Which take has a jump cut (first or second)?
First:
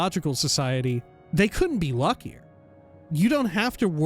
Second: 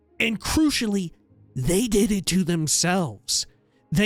first